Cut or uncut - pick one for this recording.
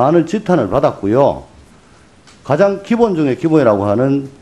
cut